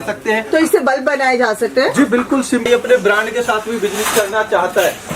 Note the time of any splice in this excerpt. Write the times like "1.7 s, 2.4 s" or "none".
2.6 s